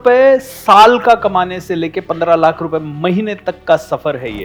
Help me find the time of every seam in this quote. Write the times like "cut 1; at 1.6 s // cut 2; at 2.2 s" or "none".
none